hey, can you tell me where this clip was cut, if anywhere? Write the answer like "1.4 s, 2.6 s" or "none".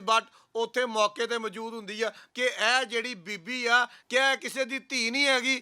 2.2 s, 4.0 s